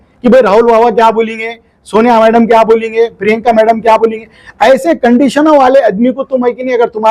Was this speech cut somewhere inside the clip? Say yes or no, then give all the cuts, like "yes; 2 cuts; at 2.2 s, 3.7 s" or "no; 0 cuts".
no; 0 cuts